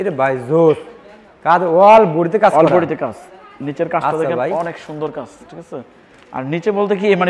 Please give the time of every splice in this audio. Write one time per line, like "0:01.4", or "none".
none